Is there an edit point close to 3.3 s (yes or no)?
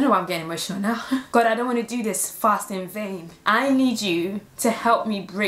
yes